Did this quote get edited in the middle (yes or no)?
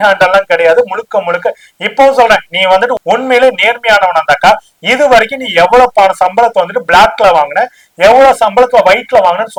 no